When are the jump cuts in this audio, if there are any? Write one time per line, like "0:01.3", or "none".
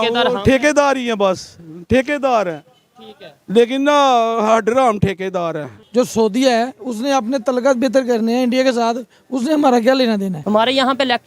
0:05.8
0:10.4